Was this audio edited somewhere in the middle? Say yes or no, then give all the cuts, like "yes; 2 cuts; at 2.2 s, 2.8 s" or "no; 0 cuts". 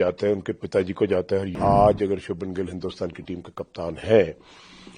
yes; 1 cut; at 1.6 s